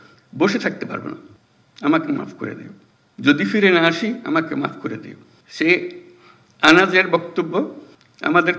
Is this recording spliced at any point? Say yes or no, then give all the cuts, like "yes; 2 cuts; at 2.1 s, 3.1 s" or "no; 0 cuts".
no; 0 cuts